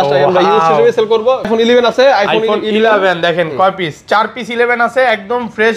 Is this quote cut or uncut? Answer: cut